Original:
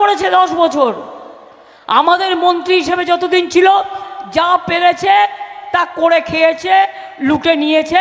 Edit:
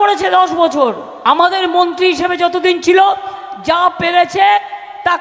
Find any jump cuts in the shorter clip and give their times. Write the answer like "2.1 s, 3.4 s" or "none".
1.1 s